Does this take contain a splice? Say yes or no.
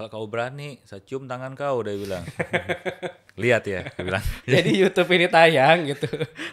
yes